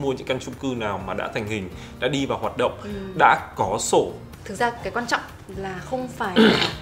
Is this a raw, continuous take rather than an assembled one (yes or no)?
no